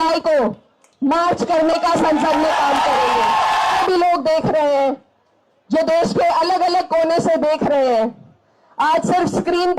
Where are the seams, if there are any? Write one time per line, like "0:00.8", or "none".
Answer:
0:03.8